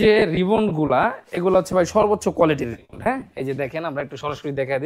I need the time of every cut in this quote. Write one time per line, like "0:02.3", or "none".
none